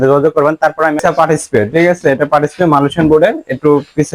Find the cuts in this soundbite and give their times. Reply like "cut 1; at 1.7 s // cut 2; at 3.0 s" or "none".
cut 1; at 1.0 s